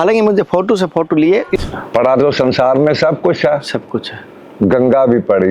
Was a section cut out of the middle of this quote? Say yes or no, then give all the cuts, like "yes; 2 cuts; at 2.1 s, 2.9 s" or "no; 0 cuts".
yes; 1 cut; at 1.6 s